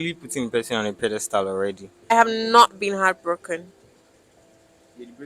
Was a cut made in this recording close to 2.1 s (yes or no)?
yes